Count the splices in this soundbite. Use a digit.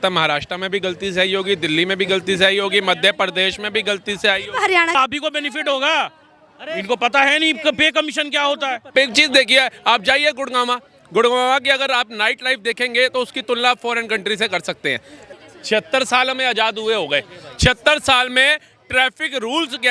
3